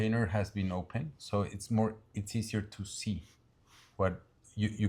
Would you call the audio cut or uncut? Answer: uncut